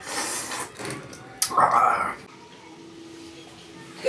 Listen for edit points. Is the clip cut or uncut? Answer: cut